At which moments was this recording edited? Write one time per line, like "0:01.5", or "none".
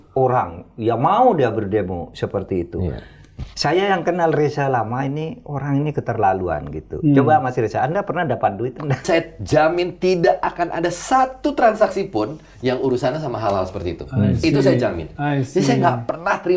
0:09.0